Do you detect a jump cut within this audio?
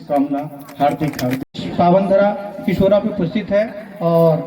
yes; 1 cut; at 1.5 s

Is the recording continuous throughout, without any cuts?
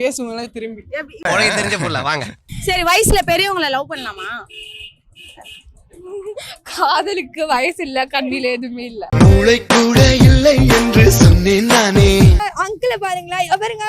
no; 3 cuts; at 1.1 s, 2.5 s, 12.4 s

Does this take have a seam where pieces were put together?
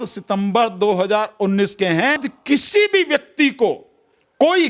yes; 1 cut; at 2.3 s

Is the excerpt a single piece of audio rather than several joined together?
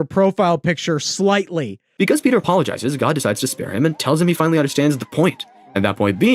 no; 1 cut; at 1.8 s

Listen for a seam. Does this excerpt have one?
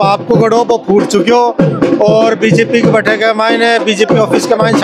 no; 0 cuts

